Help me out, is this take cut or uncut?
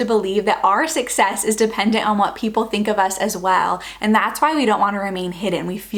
uncut